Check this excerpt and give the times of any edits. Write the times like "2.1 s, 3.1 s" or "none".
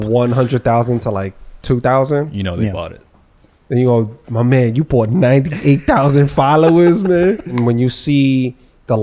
7.6 s